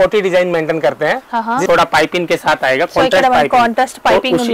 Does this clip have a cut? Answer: yes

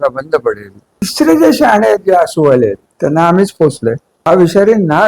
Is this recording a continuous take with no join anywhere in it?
no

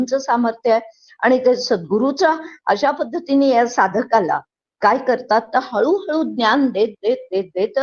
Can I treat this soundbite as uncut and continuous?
yes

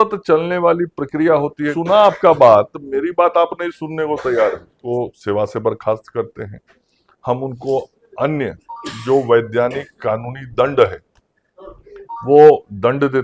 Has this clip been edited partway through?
yes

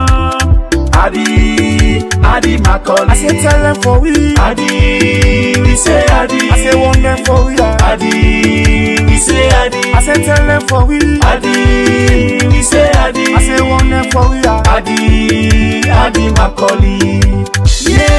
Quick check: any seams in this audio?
no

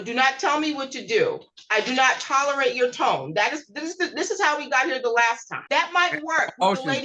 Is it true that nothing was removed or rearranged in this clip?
yes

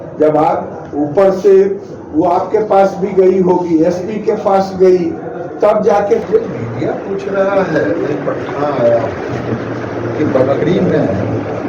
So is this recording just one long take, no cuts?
no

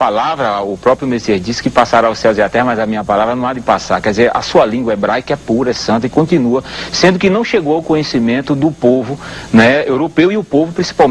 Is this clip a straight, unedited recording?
yes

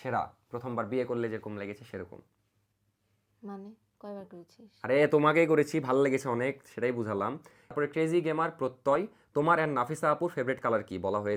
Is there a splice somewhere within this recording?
no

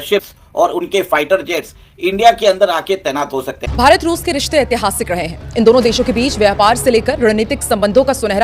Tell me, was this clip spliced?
yes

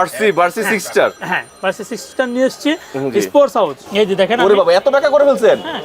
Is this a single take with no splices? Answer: no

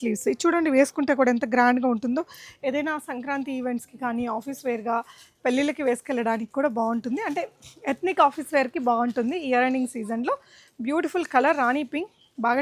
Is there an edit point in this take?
no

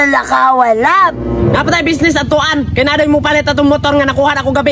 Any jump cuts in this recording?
no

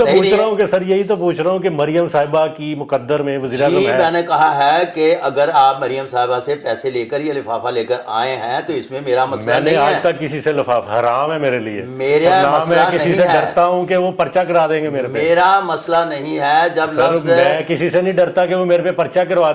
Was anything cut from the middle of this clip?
no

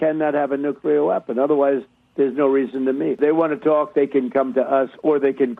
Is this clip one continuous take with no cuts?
no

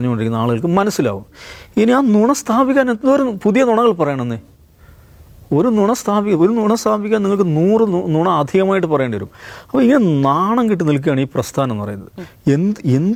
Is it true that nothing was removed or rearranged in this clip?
yes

